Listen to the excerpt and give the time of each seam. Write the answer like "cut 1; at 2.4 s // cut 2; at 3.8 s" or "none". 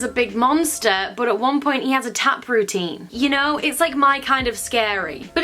none